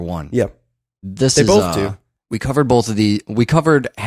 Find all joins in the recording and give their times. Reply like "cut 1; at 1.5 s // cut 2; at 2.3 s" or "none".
cut 1; at 2.5 s